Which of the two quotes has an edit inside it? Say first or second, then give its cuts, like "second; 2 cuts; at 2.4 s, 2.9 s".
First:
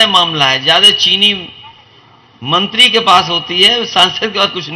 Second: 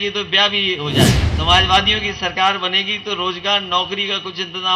second; 1 cut; at 1.3 s